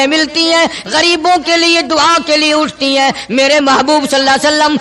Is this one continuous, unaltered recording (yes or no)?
yes